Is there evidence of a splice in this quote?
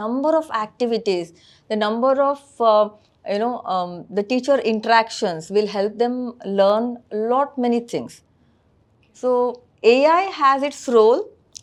no; 0 cuts

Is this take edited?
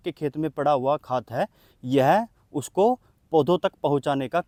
no; 0 cuts

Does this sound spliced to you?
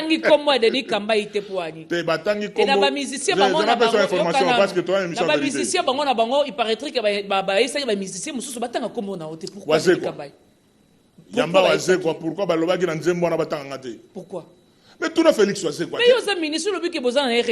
no; 0 cuts

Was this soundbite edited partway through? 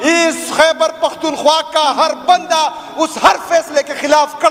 no; 0 cuts

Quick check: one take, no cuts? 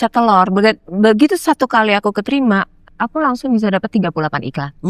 yes; 0 cuts

